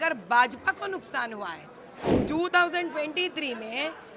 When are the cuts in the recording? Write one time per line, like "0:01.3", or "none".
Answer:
0:02.1